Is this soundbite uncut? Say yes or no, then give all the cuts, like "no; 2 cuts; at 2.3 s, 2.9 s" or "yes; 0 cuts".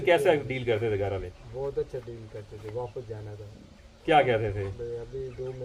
yes; 0 cuts